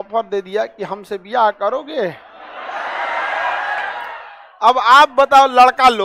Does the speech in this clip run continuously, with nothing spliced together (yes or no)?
yes